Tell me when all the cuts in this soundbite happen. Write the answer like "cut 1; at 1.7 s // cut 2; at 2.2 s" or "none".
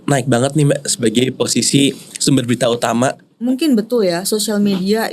cut 1; at 3.3 s

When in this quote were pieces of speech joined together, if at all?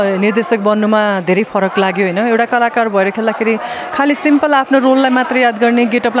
none

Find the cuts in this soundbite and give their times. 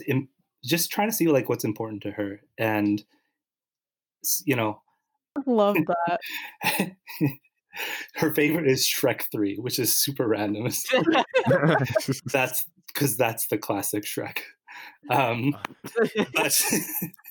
cut 1; at 5.4 s

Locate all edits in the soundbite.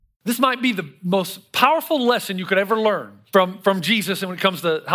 cut 1; at 3.1 s

